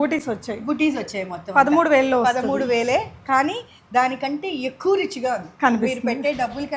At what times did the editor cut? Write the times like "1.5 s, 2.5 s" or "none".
none